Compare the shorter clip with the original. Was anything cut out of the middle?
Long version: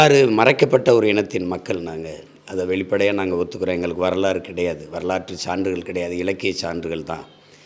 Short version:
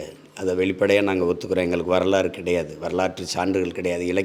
no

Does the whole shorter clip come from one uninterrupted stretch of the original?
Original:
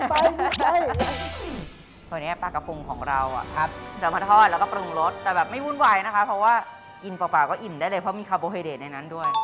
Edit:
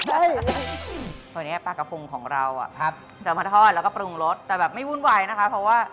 no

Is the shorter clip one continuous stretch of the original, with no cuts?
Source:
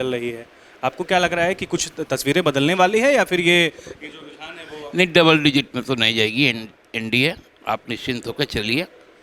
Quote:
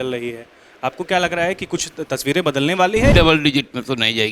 no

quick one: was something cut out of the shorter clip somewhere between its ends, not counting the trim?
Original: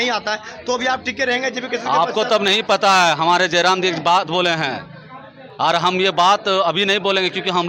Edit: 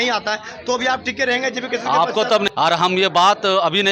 yes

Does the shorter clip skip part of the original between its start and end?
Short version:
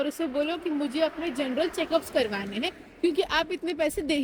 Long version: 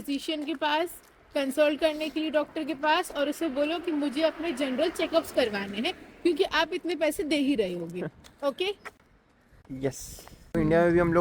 no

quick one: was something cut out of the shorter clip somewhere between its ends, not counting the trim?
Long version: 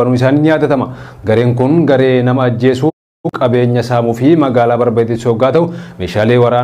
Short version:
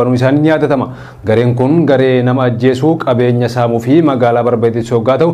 yes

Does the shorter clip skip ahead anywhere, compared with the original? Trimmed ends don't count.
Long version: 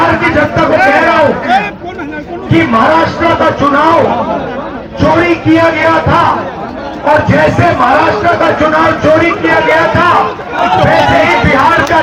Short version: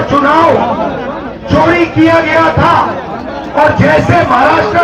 no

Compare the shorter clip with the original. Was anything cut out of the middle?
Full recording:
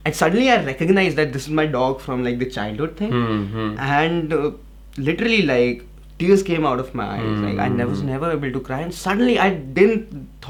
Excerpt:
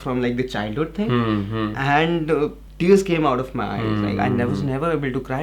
yes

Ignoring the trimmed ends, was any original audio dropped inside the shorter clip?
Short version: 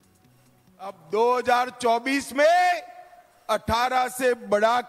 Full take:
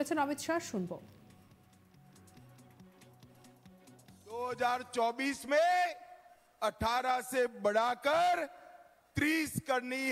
yes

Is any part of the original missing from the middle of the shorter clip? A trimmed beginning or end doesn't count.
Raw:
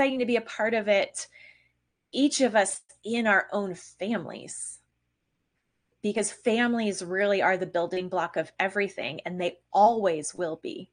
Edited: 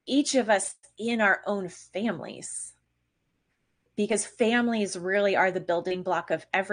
no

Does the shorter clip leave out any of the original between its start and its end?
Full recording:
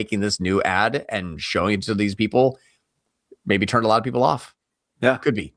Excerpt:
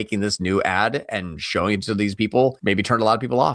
yes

